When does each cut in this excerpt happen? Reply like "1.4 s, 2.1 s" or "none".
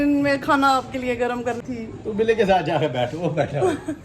1.6 s